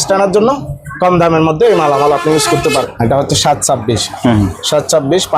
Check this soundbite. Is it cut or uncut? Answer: cut